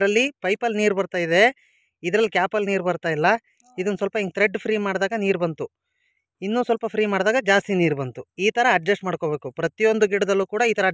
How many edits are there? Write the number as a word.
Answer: zero